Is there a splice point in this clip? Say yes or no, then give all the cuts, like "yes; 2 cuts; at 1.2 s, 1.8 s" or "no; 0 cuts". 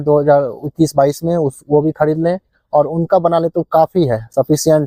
no; 0 cuts